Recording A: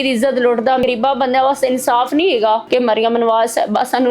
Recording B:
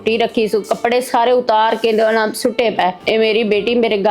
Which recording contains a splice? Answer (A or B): A